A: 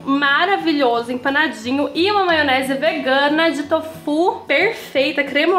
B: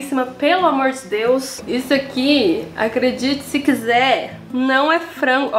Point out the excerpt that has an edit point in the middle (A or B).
B